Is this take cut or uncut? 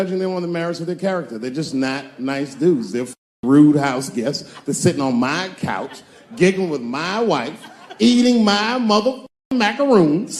uncut